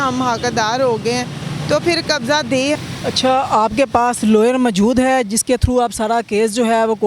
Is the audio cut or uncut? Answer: cut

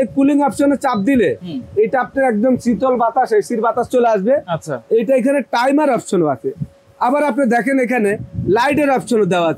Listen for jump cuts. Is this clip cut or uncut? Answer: uncut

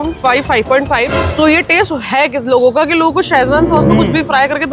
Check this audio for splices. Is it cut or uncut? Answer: cut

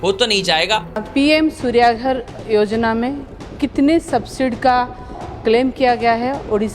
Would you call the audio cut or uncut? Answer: cut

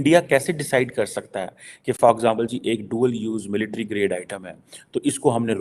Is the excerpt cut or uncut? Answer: uncut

